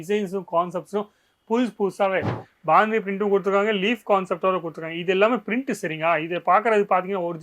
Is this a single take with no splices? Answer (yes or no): no